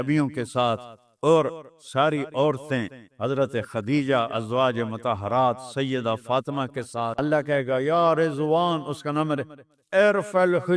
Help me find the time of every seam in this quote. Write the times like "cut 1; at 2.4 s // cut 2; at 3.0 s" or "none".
cut 1; at 7.1 s